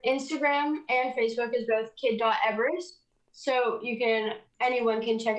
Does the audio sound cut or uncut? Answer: uncut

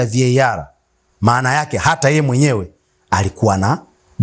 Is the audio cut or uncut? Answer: uncut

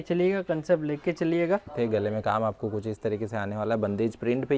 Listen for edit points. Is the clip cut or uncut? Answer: cut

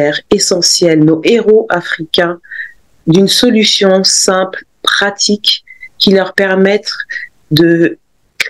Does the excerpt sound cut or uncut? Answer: uncut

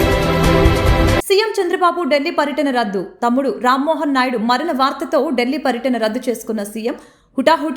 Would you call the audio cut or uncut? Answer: uncut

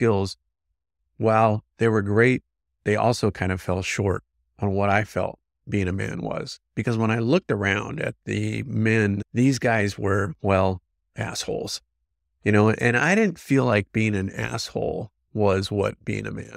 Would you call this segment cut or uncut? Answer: cut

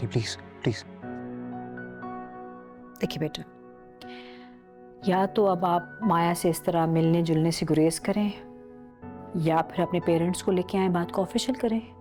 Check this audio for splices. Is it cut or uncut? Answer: uncut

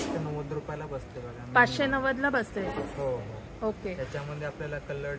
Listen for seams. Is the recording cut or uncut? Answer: uncut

